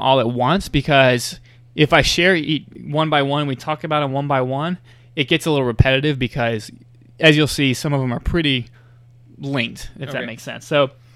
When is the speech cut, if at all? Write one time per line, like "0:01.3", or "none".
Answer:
0:02.8